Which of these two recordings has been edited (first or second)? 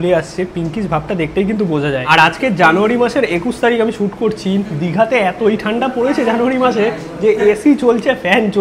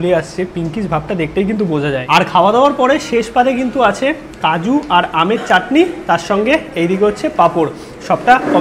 first